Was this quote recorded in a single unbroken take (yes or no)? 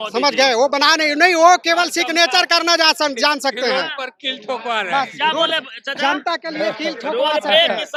yes